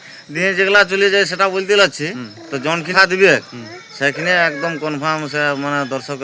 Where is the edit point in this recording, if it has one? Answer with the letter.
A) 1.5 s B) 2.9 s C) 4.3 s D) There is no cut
B